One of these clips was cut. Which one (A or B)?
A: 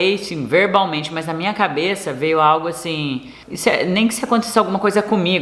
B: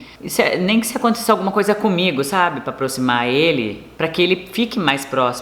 B